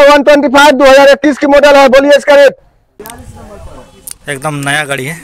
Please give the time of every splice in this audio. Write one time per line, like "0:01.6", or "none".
0:03.0